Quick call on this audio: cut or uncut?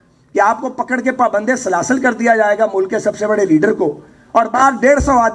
uncut